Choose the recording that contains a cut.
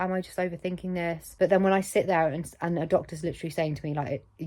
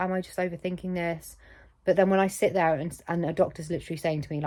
first; 1 cut; at 1.2 s

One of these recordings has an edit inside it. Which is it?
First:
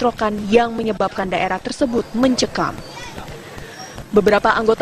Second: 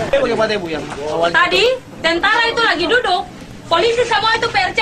second; 1 cut; at 2.9 s

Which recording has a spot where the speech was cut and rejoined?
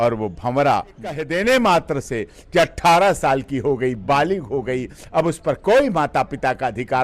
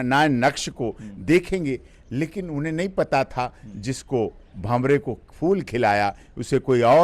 first; 1 cut; at 1.2 s

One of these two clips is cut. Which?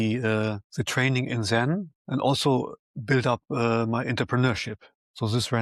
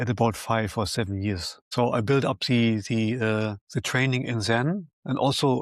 second; 1 cut; at 1.6 s

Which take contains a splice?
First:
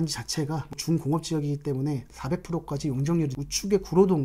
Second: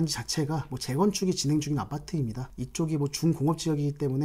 first; 3 cuts; at 0.8 s, 2.1 s, 3.3 s

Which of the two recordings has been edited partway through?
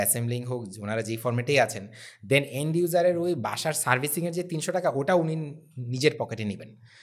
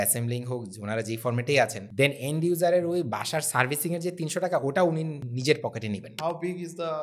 second; 3 cuts; at 1.8 s, 5.2 s, 6.1 s

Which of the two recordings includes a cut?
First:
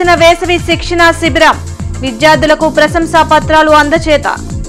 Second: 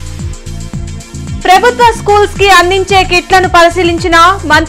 second; 1 cut; at 1.2 s

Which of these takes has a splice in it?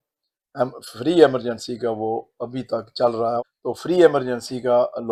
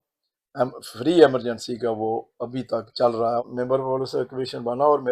second; 1 cut; at 3.5 s

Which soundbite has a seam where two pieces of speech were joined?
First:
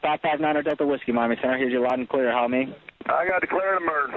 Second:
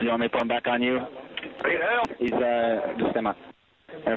second; 1 cut; at 2.1 s

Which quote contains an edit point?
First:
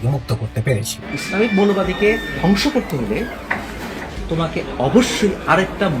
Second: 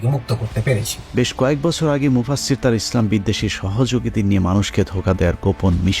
first; 1 cut; at 1.0 s

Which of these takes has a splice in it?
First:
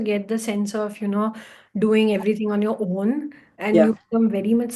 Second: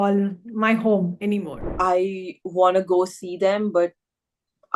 second; 1 cut; at 1.5 s

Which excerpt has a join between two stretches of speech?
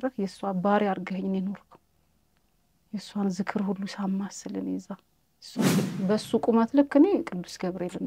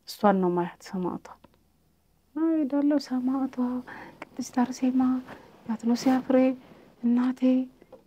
first; 1 cut; at 5.8 s

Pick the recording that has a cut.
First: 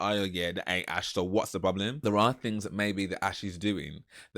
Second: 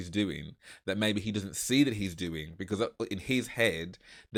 first; 1 cut; at 2.0 s

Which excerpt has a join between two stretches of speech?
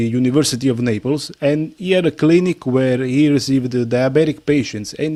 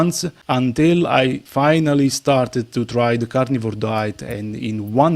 second; 1 cut; at 1.4 s

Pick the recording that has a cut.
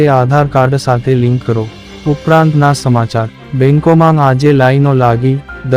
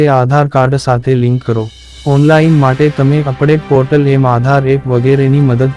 first; 1 cut; at 1.8 s

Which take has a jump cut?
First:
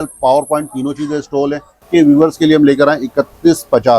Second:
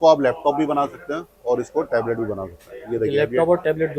first; 1 cut; at 1.8 s

